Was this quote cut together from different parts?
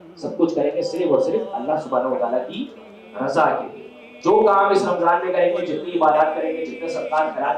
no; 0 cuts

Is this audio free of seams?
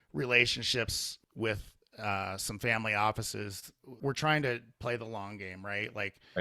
no; 2 cuts; at 1.2 s, 4.0 s

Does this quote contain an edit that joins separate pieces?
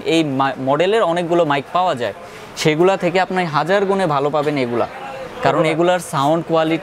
no; 0 cuts

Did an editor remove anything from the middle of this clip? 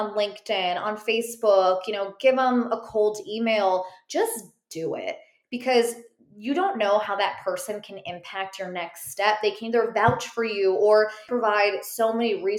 yes; 1 cut; at 11.3 s

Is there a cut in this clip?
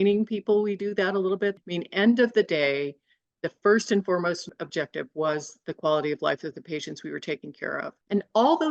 yes; 1 cut; at 1.5 s

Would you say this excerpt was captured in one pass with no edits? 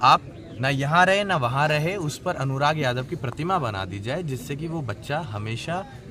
yes; 0 cuts

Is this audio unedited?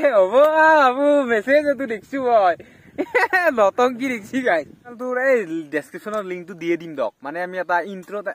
no; 1 cut; at 4.9 s

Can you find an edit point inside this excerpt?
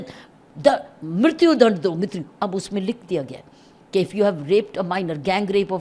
no; 0 cuts

